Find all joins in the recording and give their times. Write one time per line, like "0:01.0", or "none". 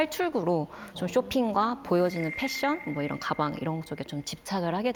none

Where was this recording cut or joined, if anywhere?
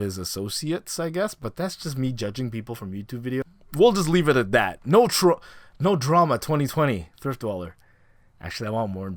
none

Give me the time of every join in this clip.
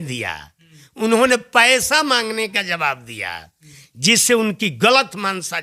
none

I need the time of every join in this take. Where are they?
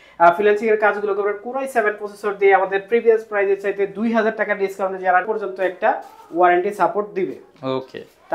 0:05.3

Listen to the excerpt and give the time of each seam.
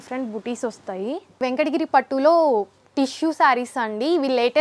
0:01.4

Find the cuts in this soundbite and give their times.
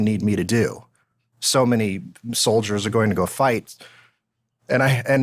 none

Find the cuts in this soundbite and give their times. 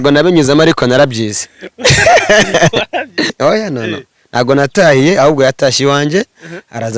0:03.3

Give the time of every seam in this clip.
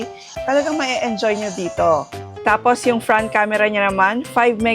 0:02.2

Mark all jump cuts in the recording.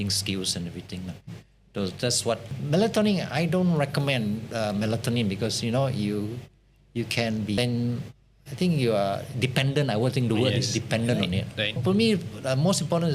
0:02.5
0:07.6
0:11.8

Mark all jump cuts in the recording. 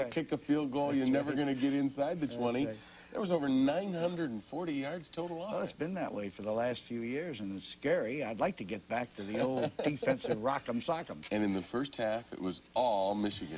0:09.5

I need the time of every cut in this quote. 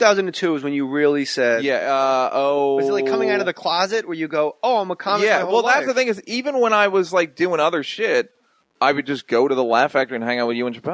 none

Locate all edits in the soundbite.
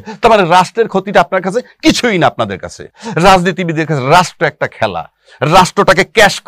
none

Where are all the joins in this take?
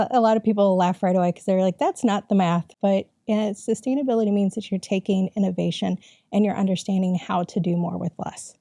0:02.7

